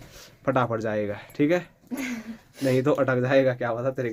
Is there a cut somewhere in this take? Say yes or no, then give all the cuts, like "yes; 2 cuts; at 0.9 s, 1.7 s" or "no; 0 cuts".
no; 0 cuts